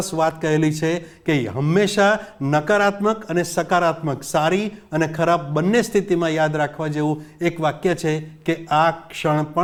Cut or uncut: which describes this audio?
uncut